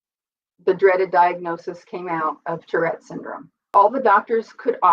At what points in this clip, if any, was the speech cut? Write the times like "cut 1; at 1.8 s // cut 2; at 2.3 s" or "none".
cut 1; at 3.7 s